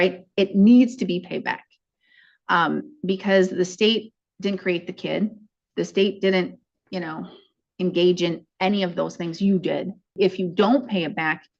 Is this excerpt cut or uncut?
cut